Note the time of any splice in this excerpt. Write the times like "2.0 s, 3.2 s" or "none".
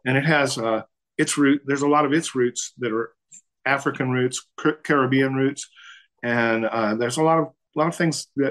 4.5 s, 7.6 s